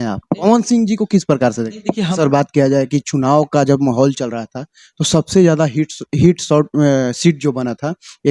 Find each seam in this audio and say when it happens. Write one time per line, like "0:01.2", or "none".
0:02.1